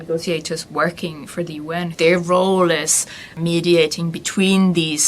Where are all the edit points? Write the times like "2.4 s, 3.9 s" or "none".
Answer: 1.9 s, 3.4 s